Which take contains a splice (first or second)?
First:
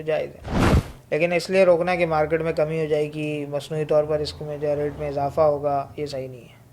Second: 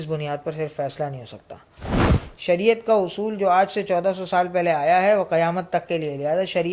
second